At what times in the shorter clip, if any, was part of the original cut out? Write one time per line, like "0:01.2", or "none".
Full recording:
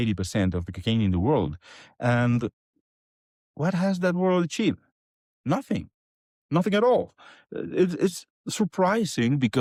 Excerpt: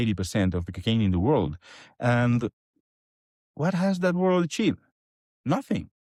none